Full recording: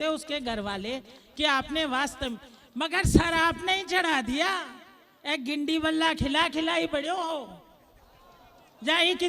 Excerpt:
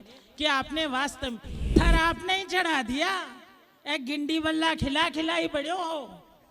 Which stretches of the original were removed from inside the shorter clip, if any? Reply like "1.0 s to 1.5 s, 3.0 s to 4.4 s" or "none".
2.8 s to 3.2 s